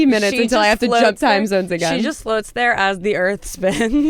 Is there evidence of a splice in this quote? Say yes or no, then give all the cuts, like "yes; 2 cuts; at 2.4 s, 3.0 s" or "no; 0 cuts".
no; 0 cuts